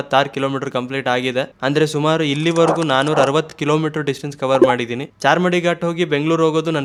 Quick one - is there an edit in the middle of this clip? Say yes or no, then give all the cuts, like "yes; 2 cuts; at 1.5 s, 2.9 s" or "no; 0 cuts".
no; 0 cuts